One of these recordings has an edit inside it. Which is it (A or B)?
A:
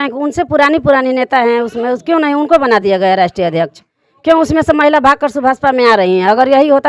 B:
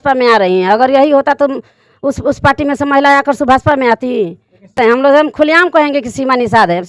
B